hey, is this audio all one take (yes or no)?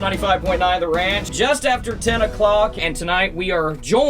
no